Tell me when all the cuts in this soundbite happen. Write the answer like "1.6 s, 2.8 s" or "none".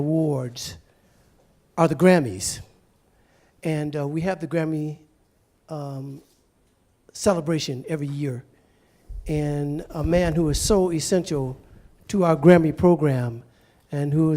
6.5 s